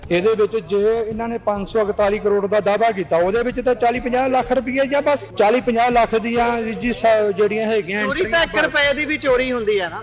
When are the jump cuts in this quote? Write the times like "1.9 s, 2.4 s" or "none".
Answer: 5.3 s